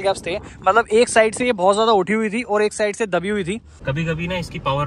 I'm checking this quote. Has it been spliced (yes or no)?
yes